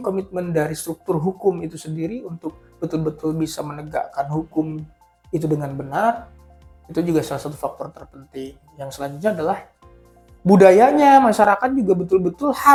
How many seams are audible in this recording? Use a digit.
0